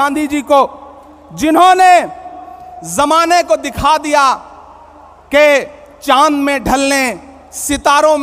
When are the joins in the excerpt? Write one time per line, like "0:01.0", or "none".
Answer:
none